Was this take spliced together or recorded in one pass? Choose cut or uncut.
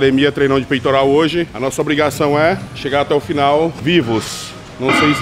cut